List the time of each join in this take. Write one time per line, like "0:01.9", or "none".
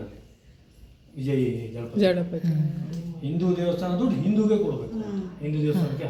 none